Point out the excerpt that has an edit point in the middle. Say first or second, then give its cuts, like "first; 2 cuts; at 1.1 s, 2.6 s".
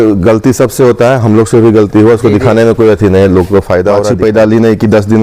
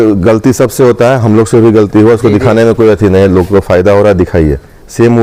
first; 1 cut; at 3.6 s